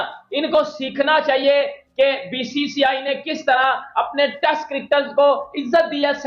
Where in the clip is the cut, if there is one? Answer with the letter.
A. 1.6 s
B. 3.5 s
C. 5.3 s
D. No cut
D